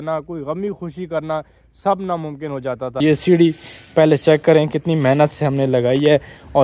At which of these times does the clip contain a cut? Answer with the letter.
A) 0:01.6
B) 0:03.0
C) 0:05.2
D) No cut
B